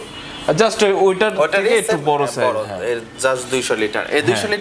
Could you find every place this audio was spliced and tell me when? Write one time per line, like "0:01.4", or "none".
none